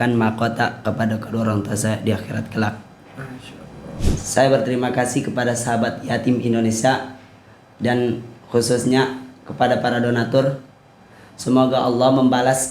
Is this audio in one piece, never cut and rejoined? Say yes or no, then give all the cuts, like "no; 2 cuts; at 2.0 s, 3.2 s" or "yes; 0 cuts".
no; 1 cut; at 4.1 s